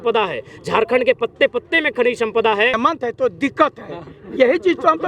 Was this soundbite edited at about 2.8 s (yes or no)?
yes